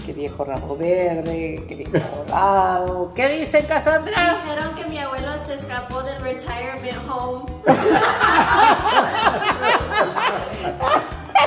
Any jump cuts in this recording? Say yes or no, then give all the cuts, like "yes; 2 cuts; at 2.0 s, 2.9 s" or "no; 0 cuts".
no; 0 cuts